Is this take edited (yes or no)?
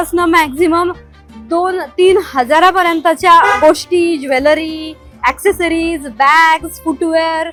no